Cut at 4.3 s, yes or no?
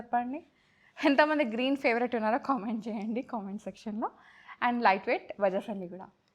no